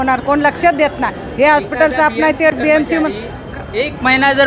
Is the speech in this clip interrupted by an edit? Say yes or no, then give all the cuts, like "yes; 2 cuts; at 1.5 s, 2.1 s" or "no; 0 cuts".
no; 0 cuts